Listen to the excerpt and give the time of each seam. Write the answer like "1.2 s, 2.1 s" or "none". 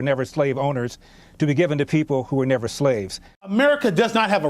3.5 s